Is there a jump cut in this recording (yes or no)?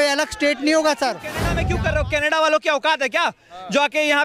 yes